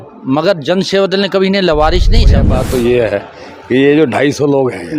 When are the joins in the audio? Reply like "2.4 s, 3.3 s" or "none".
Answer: 2.5 s